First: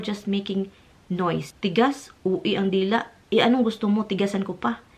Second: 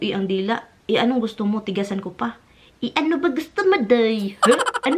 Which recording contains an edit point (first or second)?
first